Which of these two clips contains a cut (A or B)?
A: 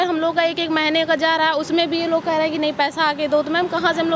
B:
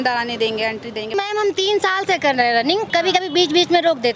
B